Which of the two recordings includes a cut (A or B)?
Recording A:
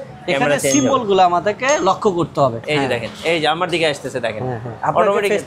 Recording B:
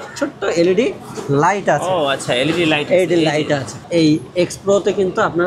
A